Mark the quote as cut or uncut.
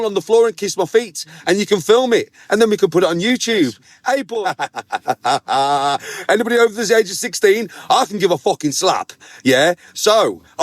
cut